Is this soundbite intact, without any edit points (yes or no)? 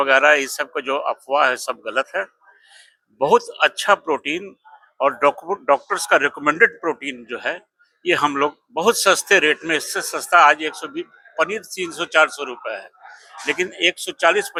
yes